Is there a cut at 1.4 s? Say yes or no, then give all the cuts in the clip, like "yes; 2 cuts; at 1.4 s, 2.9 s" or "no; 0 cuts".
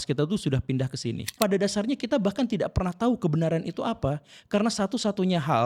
yes; 1 cut; at 1.4 s